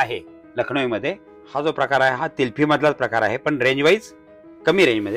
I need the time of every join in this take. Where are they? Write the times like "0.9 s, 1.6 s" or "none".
1.3 s